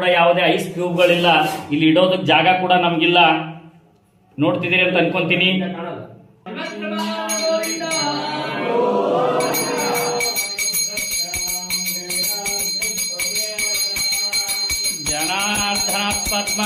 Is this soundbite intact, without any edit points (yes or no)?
no